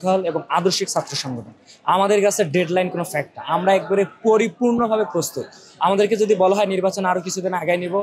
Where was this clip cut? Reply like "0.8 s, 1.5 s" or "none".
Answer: none